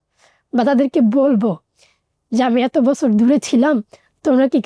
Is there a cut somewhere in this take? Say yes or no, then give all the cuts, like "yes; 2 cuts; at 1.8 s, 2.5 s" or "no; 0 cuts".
no; 0 cuts